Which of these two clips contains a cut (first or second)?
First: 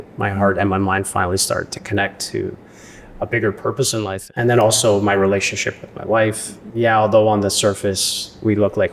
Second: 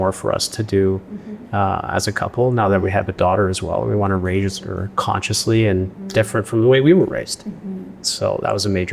first